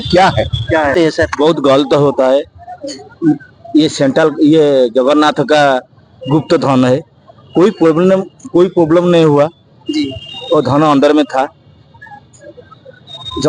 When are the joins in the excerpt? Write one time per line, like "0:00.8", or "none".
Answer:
0:00.9